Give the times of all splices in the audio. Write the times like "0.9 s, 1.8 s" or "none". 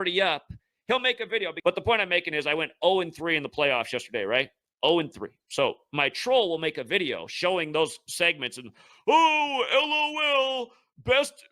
1.5 s